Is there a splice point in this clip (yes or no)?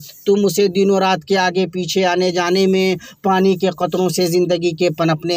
no